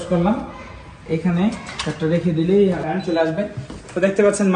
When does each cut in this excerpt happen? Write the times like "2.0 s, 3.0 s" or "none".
2.8 s